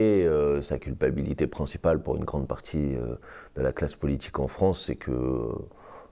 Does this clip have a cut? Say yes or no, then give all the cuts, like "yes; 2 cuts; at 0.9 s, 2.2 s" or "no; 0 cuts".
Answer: no; 0 cuts